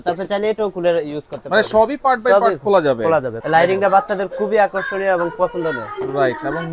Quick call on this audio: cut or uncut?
cut